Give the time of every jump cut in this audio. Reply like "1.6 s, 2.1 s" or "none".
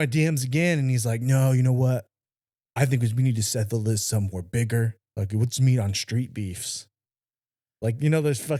none